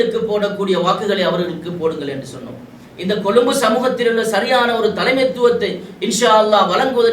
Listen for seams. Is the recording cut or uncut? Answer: uncut